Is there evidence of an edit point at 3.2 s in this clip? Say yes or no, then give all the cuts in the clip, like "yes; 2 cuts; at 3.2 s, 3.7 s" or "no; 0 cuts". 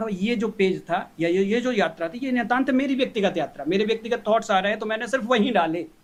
no; 0 cuts